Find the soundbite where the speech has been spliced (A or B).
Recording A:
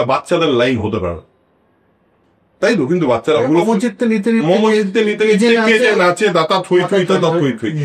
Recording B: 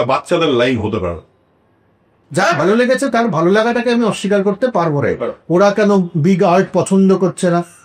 B